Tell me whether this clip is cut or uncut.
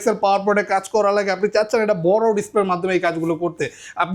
uncut